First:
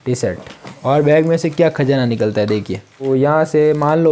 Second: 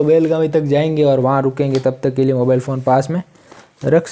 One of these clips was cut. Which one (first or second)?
first